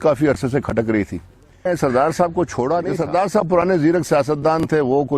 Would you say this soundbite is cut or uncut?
cut